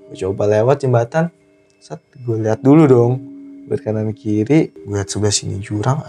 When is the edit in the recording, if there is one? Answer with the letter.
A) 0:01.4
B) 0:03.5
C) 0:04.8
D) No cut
C